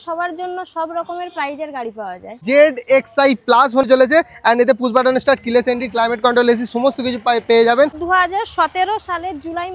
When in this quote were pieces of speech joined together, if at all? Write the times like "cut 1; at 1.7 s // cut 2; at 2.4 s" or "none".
cut 1; at 2.4 s // cut 2; at 3.8 s // cut 3; at 8.0 s